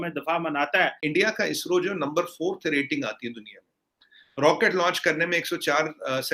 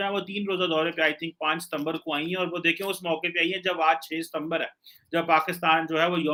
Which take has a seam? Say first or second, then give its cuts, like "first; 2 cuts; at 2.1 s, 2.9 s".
first; 1 cut; at 1.0 s